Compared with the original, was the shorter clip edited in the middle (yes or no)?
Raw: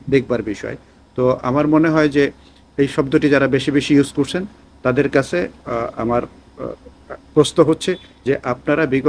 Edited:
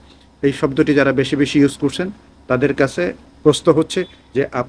yes